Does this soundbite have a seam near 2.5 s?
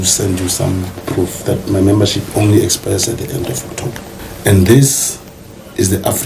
no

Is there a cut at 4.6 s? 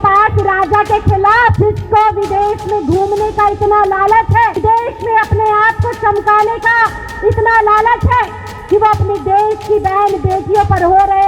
yes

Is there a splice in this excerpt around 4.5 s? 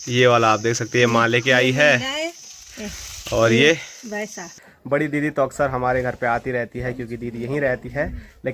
yes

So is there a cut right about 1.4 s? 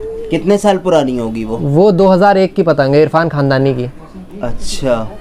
no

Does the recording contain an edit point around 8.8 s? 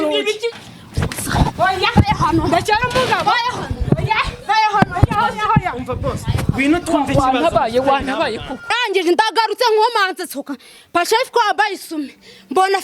yes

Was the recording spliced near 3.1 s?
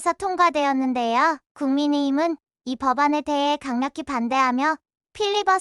no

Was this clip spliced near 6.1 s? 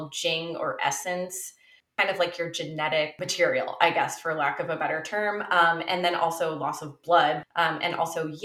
no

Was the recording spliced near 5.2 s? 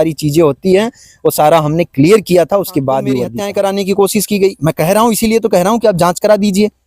no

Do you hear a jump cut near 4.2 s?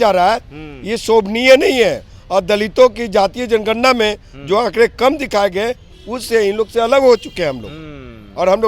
no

